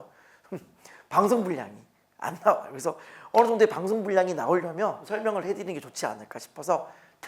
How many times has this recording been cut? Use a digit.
1